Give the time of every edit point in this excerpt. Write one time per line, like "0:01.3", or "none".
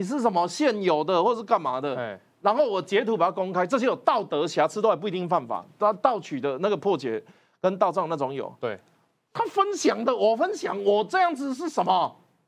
0:09.3